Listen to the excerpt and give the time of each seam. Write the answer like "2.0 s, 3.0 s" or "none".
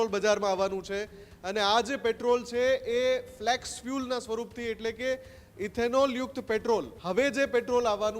7.0 s